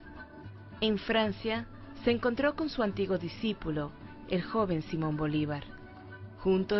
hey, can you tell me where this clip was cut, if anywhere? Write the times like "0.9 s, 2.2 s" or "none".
3.4 s